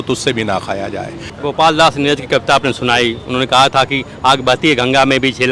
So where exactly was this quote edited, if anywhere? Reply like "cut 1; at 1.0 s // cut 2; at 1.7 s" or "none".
cut 1; at 1.2 s